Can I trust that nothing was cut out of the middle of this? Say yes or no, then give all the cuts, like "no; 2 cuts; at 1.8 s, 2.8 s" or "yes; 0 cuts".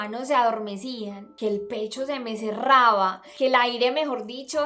no; 2 cuts; at 1.2 s, 3.2 s